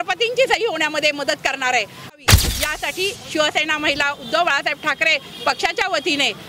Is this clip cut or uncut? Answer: cut